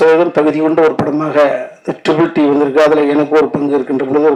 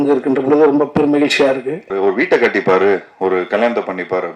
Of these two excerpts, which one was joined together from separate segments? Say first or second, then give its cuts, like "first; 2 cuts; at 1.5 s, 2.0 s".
second; 1 cut; at 1.9 s